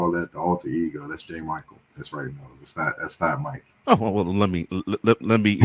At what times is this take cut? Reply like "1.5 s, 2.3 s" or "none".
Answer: 3.7 s